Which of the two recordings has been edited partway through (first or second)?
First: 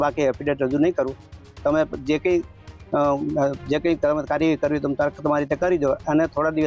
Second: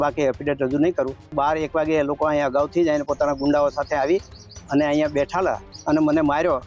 second